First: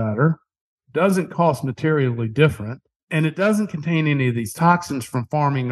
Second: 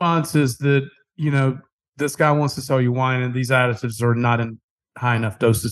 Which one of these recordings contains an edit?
first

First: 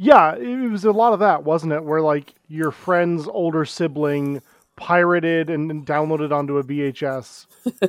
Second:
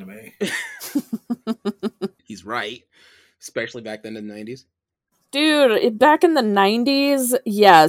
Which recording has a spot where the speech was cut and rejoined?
second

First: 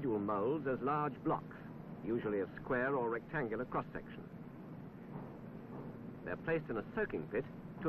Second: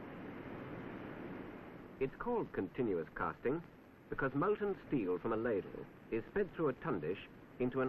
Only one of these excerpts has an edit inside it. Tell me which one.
second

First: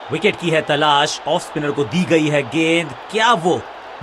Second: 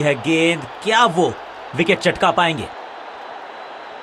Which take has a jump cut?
second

